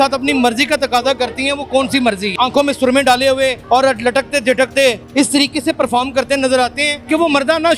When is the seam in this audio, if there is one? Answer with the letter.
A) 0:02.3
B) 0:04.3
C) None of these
A